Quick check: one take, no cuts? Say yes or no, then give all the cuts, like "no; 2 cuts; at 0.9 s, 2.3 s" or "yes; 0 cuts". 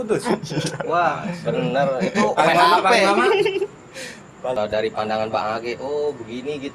no; 1 cut; at 4.6 s